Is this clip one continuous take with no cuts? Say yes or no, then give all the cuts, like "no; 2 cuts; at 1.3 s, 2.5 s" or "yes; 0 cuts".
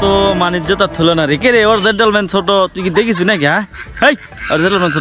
yes; 0 cuts